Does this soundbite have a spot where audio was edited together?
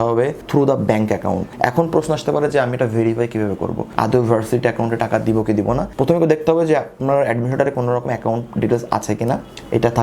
yes; 1 cut; at 1.5 s

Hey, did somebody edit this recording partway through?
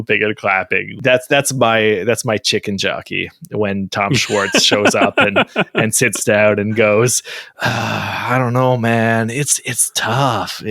yes; 1 cut; at 0.9 s

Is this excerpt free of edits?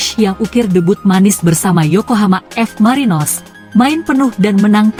yes; 0 cuts

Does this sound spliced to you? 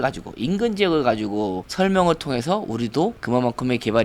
yes; 1 cut; at 1.6 s

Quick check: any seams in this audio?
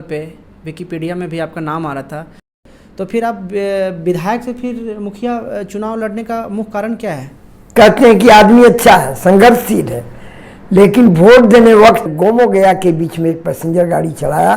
yes; 3 cuts; at 2.5 s, 7.5 s, 12.1 s

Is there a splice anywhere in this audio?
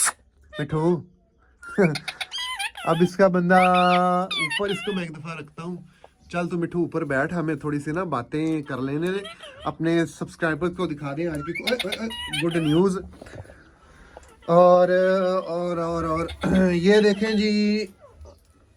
no; 0 cuts

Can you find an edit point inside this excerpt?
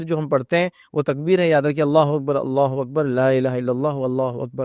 no; 0 cuts

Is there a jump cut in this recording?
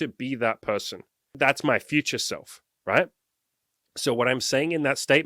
yes; 1 cut; at 1.4 s

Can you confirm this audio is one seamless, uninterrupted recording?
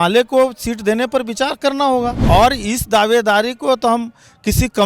no; 1 cut; at 2.2 s

